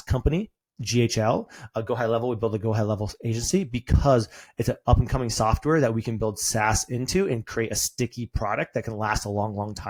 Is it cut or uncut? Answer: uncut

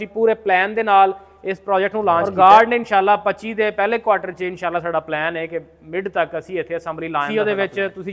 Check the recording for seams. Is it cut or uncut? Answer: cut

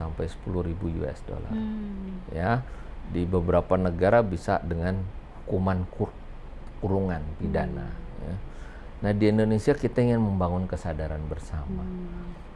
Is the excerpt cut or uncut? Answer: uncut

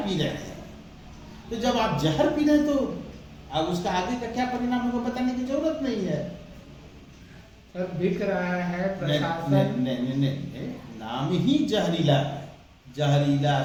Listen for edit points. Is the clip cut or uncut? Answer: uncut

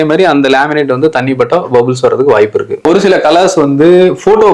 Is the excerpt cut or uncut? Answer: cut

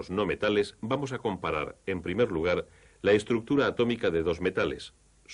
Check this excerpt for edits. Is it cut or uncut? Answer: uncut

